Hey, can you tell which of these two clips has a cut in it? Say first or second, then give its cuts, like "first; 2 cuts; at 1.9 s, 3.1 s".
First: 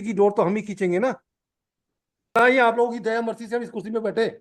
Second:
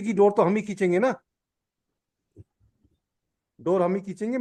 first; 1 cut; at 2.4 s